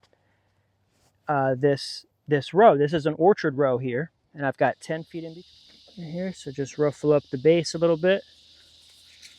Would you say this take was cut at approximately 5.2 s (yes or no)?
yes